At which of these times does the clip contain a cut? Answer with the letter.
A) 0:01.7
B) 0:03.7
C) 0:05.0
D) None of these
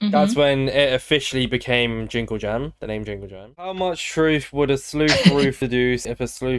B